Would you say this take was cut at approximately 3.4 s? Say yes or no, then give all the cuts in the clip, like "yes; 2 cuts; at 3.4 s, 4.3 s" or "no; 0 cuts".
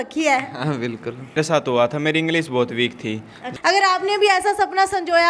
yes; 2 cuts; at 1.4 s, 3.4 s